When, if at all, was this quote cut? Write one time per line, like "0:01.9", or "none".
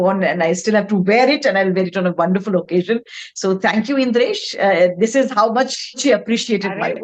0:06.0